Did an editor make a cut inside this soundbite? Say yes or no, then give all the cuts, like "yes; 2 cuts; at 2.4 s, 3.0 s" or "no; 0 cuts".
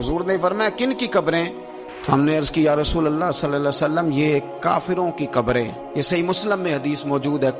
no; 0 cuts